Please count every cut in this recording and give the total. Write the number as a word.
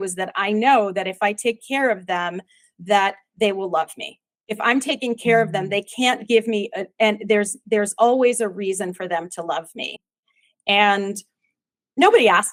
zero